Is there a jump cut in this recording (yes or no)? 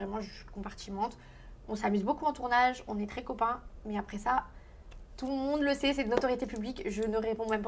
no